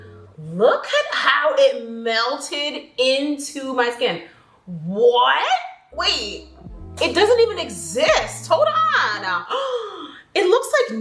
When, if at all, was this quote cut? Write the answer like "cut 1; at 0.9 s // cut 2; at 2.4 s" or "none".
none